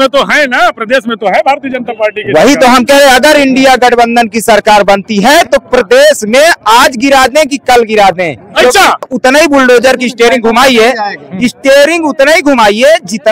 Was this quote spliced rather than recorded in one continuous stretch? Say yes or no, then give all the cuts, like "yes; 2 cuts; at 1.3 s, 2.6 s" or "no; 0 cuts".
yes; 1 cut; at 9.1 s